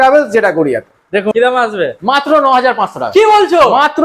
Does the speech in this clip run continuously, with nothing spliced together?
no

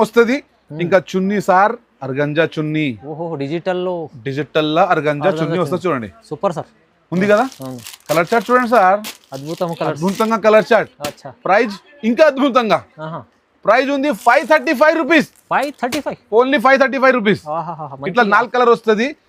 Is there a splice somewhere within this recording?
no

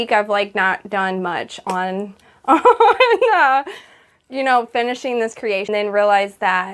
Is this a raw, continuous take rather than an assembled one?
no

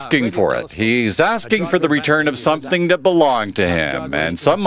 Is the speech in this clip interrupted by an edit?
no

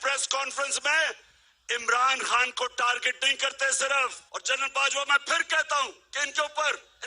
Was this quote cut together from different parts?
yes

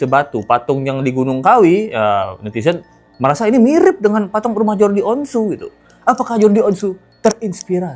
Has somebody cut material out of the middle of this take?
no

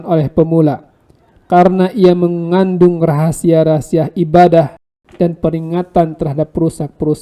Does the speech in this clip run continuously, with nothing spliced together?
no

